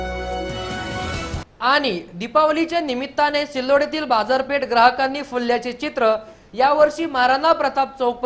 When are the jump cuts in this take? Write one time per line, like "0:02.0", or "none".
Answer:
none